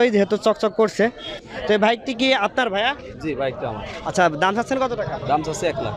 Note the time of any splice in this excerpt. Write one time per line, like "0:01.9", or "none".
0:01.5